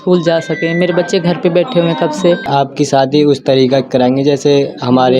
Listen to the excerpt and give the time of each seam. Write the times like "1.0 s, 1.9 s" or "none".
2.5 s